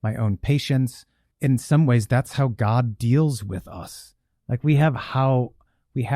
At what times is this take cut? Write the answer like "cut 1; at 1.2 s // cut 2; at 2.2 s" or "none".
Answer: cut 1; at 1.2 s